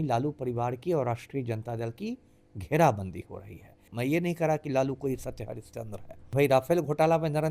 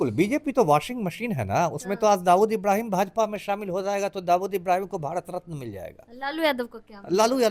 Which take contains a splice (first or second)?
first